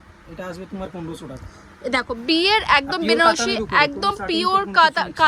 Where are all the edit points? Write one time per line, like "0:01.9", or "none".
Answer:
none